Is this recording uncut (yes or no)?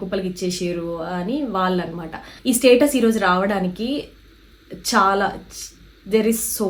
yes